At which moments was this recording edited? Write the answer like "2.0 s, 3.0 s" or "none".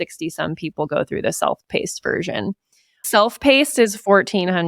3.1 s